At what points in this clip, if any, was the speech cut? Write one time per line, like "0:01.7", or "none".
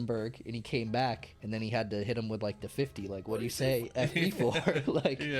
0:01.3